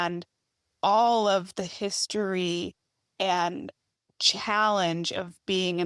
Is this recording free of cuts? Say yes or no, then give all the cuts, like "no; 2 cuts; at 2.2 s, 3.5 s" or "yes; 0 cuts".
yes; 0 cuts